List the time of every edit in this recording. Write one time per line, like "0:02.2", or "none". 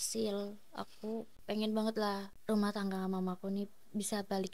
0:01.3
0:02.3